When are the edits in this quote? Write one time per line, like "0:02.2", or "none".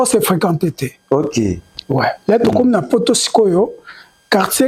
none